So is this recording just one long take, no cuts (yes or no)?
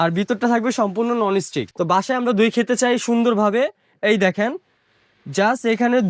no